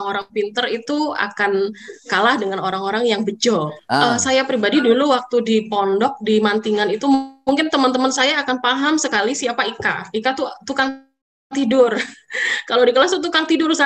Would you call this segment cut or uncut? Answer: cut